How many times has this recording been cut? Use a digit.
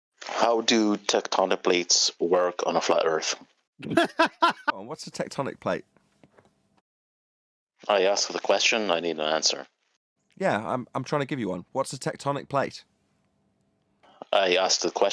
1